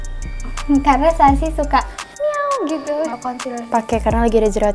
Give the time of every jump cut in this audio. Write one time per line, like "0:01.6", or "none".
0:03.2